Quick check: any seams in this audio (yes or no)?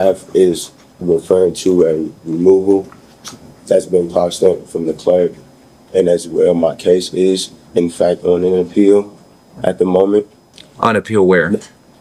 no